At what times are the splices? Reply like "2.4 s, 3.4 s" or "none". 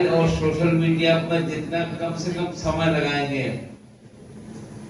none